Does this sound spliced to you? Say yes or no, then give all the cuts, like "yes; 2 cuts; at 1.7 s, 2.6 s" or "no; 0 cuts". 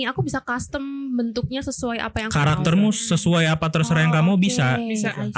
no; 0 cuts